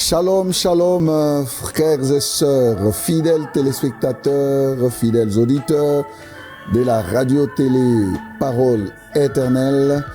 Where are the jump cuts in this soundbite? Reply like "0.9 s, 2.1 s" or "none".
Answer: 1.0 s